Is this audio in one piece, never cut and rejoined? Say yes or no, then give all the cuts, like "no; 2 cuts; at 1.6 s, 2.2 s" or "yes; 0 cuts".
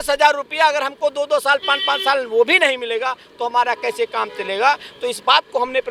yes; 0 cuts